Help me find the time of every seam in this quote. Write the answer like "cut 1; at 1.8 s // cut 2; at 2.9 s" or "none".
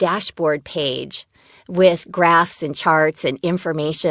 none

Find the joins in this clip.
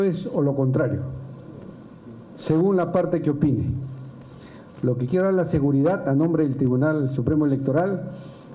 none

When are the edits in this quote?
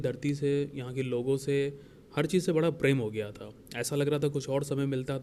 none

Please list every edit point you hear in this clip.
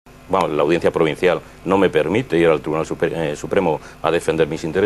cut 1; at 3.4 s

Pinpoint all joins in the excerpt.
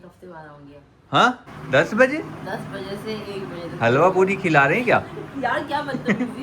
cut 1; at 1.5 s

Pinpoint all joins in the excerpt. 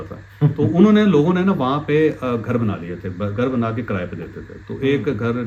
none

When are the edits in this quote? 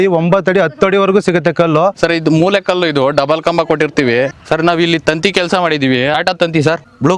cut 1; at 2.0 s // cut 2; at 4.4 s // cut 3; at 6.3 s

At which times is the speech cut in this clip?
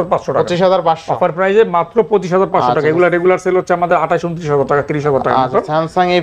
none

